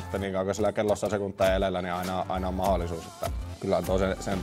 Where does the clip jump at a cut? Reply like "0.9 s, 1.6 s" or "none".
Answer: 3.5 s

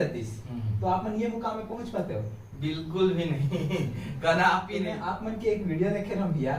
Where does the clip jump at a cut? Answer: 4.9 s

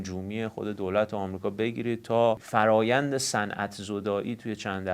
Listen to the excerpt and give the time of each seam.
2.4 s

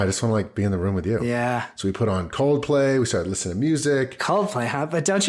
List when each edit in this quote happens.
4.2 s

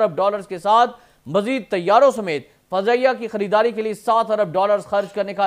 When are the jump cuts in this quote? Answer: none

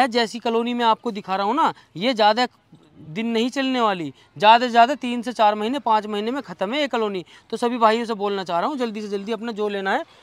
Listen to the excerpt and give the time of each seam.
none

